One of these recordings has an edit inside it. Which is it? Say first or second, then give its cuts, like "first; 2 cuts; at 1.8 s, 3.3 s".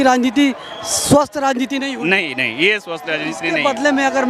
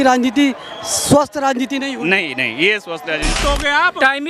second; 1 cut; at 3.3 s